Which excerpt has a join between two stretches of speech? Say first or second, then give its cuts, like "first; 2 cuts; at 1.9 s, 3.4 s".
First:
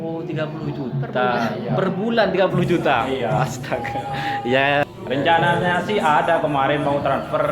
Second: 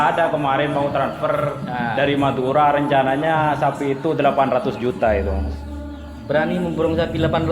first; 1 cut; at 4.8 s